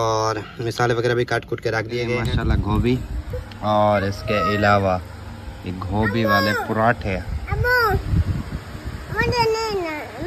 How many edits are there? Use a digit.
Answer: 1